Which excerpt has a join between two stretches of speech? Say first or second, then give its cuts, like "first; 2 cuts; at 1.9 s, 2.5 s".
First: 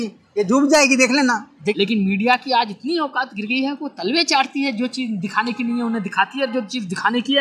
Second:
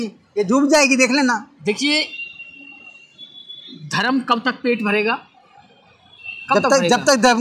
first; 1 cut; at 1.8 s